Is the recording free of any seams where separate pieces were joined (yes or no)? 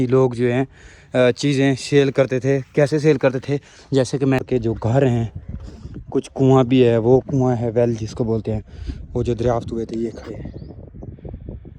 no